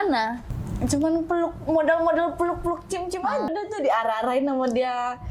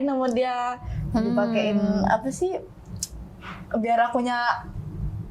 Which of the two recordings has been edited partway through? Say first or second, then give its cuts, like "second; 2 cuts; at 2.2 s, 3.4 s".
first; 1 cut; at 3.5 s